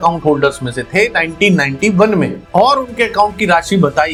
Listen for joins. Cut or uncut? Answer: uncut